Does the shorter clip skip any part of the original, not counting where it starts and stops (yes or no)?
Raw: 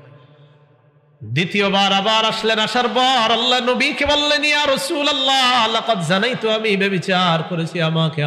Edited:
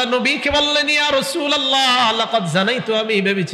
no